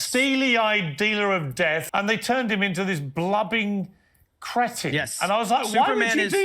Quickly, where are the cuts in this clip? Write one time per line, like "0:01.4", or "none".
0:01.8